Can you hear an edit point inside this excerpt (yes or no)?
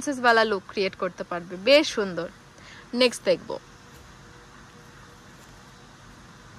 no